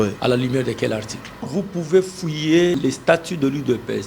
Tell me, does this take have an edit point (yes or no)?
yes